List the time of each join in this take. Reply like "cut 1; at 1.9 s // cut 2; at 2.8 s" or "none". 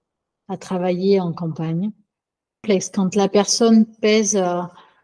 cut 1; at 2.8 s